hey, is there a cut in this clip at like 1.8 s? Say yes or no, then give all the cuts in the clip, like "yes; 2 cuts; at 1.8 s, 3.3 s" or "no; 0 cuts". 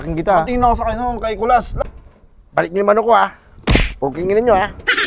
yes; 1 cut; at 1.8 s